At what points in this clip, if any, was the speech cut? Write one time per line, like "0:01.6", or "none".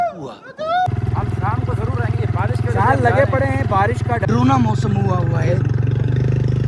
0:00.9
0:04.2